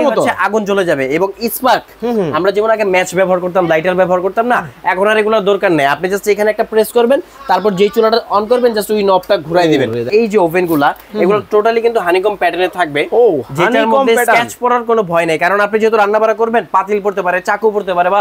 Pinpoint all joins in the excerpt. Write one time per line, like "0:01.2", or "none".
0:10.1

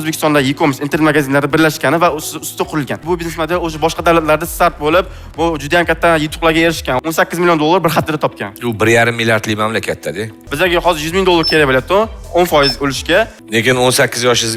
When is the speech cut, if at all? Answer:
0:03.0
0:07.0
0:10.3
0:13.4

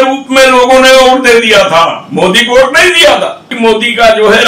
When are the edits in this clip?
0:03.5

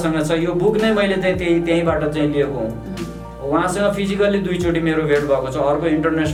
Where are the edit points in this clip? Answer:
none

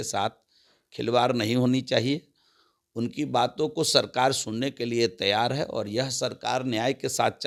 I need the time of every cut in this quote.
none

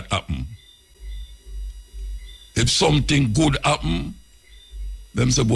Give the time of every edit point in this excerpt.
0:00.9

